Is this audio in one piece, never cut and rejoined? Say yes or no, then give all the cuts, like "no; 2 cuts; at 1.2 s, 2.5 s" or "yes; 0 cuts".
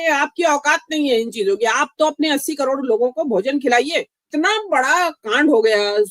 no; 1 cut; at 4.3 s